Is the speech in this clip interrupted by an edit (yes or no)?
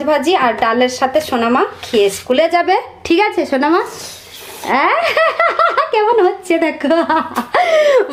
no